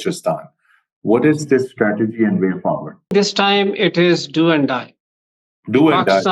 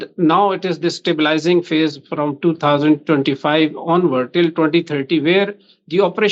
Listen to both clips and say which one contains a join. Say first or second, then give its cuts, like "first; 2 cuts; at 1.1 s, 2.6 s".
first; 1 cut; at 3.1 s